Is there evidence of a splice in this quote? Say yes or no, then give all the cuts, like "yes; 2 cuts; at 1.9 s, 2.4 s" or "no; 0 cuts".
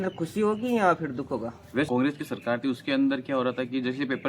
yes; 1 cut; at 1.9 s